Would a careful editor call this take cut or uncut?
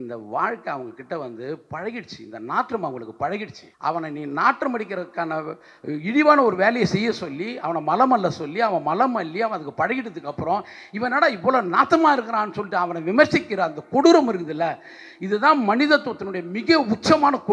cut